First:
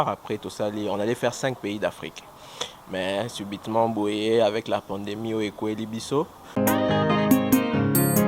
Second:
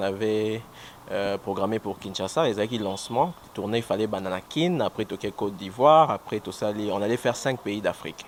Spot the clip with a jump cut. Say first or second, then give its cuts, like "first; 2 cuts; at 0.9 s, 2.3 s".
first; 1 cut; at 6.4 s